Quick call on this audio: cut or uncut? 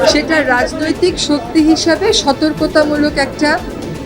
uncut